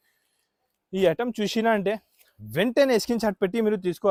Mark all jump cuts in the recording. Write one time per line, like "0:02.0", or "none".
none